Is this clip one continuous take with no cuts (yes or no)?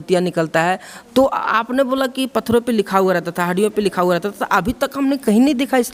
yes